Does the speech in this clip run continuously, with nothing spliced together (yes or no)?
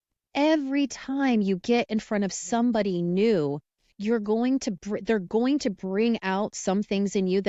yes